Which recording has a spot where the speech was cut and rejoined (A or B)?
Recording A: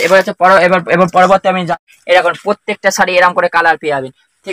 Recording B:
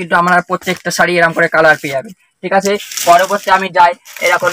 A